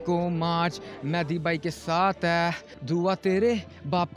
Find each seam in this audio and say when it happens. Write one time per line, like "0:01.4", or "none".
0:02.7